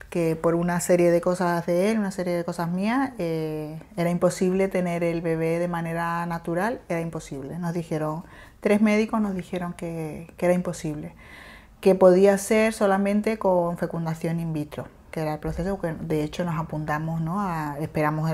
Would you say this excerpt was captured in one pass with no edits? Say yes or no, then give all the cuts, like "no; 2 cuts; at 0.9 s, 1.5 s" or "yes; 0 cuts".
yes; 0 cuts